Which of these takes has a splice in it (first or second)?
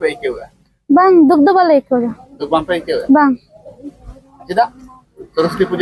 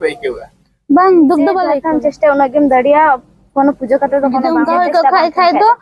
second